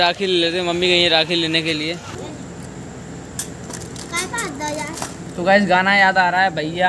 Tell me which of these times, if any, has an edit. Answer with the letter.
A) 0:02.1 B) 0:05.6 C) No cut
A